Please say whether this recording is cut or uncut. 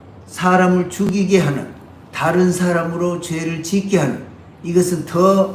uncut